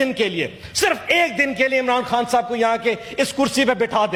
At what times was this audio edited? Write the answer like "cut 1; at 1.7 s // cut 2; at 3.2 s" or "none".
none